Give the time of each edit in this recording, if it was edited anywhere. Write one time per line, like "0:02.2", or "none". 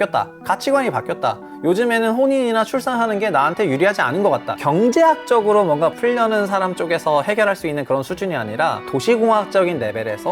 0:04.5
0:06.0